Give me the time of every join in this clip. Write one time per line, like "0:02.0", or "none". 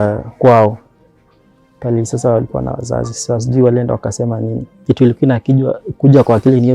0:04.7